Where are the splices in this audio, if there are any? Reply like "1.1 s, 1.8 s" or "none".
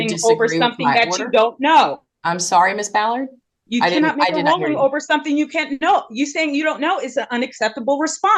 none